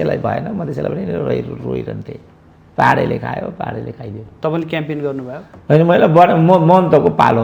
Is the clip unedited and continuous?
yes; 0 cuts

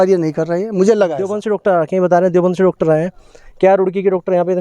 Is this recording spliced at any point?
yes; 1 cut; at 1.4 s

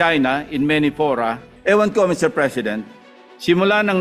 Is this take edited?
yes; 1 cut; at 1.5 s

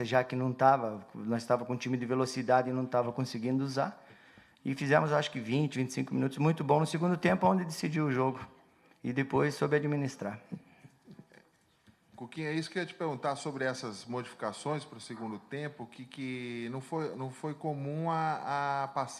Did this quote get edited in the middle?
yes; 1 cut; at 13.5 s

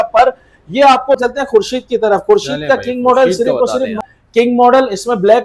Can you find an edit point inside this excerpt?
yes; 2 cuts; at 1.2 s, 4.0 s

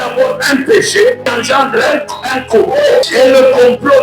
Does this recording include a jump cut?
yes; 2 cuts; at 1.3 s, 3.0 s

